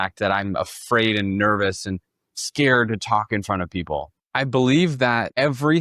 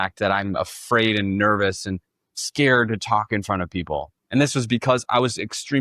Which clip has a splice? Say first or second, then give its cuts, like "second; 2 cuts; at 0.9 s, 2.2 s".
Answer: first; 1 cut; at 4.2 s